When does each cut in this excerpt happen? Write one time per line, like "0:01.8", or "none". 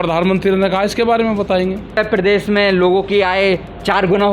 0:01.9